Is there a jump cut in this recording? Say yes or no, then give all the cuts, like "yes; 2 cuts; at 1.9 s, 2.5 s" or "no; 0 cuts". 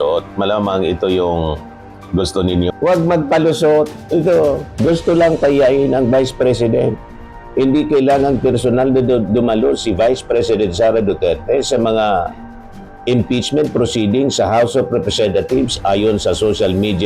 yes; 1 cut; at 2.7 s